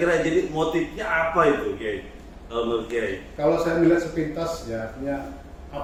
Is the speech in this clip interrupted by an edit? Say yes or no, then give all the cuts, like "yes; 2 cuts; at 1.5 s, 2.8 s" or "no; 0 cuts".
no; 0 cuts